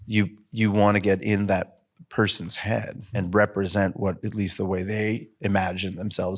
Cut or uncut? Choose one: cut